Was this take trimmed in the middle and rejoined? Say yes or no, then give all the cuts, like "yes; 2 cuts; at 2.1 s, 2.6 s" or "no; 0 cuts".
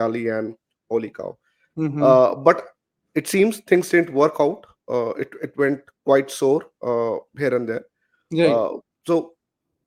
no; 0 cuts